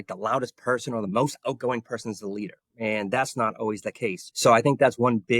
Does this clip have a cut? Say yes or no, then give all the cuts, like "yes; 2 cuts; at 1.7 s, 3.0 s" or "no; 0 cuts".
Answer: yes; 1 cut; at 4.2 s